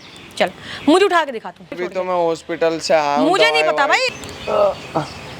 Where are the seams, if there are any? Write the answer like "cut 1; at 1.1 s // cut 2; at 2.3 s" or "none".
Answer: cut 1; at 1.8 s // cut 2; at 4.1 s